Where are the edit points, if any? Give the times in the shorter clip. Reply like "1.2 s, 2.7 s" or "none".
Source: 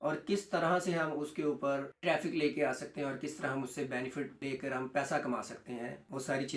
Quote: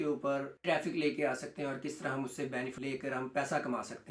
2.7 s